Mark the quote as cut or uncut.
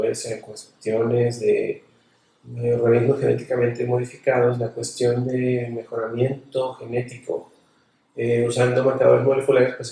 uncut